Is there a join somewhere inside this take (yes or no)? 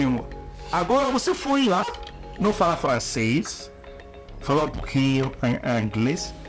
no